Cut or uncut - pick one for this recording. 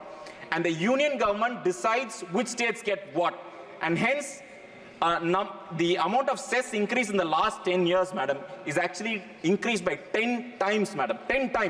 uncut